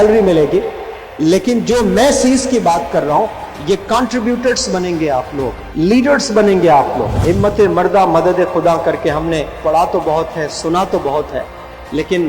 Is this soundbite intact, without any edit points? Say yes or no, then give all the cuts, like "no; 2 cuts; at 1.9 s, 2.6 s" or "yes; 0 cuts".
no; 2 cuts; at 5.6 s, 7.1 s